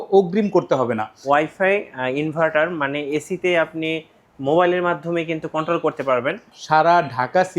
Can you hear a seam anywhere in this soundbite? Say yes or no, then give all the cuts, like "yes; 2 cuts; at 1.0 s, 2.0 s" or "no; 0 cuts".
yes; 2 cuts; at 1.2 s, 6.5 s